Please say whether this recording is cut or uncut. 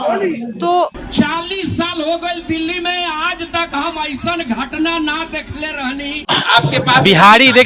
cut